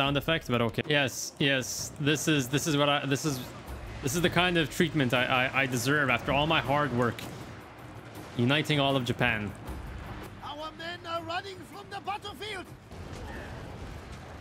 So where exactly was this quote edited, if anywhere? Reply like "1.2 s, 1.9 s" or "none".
0.8 s, 12.9 s

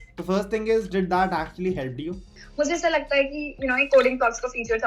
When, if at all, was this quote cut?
2.4 s

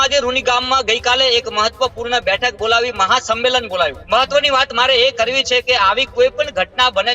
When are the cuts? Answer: 4.0 s

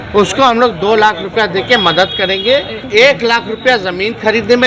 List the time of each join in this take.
2.8 s

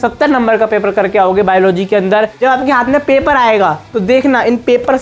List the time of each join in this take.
2.3 s

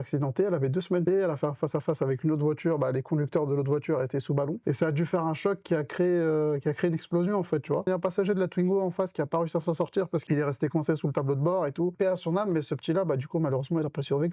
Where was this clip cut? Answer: 1.0 s, 4.6 s, 7.9 s, 10.2 s, 11.9 s

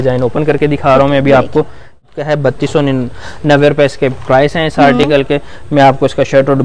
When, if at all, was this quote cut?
2.0 s

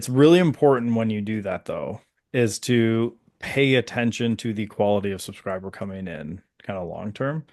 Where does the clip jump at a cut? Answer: none

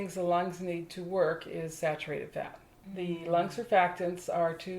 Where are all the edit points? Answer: 2.9 s

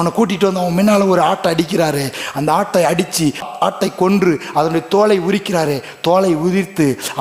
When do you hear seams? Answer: 3.5 s

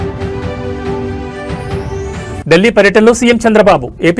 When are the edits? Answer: none

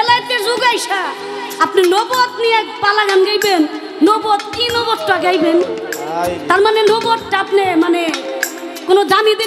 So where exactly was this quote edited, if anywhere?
none

